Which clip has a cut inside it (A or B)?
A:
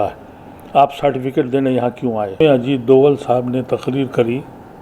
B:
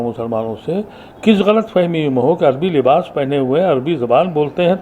A